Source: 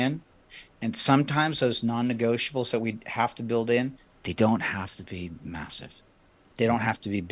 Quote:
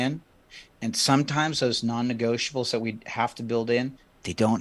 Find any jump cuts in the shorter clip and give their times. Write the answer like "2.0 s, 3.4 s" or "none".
none